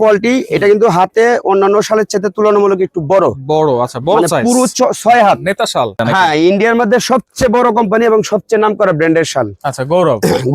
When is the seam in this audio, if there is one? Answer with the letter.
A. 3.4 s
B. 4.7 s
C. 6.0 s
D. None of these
C